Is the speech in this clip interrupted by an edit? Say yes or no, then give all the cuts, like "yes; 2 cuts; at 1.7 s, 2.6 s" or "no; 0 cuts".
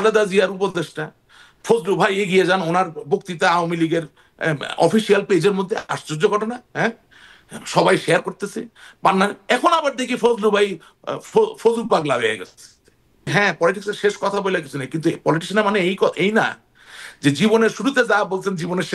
yes; 1 cut; at 13.3 s